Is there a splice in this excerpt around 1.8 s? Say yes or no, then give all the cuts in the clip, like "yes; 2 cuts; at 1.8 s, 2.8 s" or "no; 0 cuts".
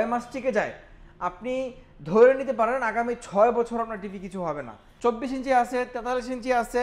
no; 1 cut; at 4.8 s